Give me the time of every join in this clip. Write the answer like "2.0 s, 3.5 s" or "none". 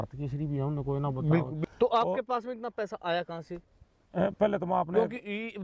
1.5 s

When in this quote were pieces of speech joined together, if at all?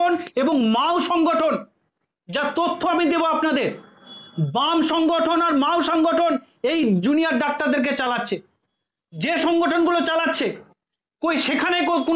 none

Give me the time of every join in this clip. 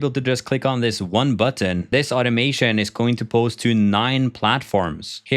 1.9 s

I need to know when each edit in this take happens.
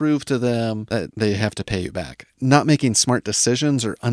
1.0 s, 2.2 s

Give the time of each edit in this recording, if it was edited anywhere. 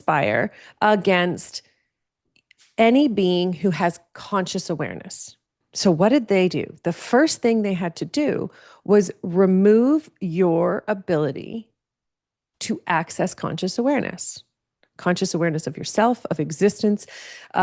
5.6 s

